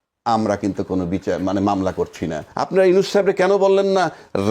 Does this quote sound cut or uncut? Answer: cut